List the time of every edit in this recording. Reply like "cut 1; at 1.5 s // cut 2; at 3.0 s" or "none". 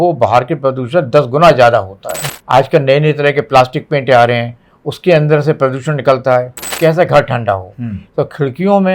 cut 1; at 2.1 s // cut 2; at 6.8 s